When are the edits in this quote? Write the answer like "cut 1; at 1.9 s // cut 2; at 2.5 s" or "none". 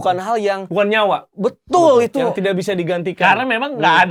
none